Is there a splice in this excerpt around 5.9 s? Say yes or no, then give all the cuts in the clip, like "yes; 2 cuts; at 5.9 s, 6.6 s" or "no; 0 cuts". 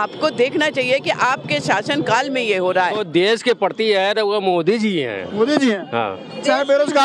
no; 1 cut; at 3.0 s